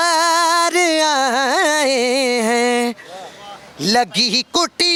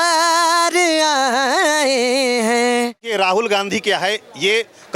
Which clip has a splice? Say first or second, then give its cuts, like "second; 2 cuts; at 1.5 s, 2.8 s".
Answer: second; 1 cut; at 3.1 s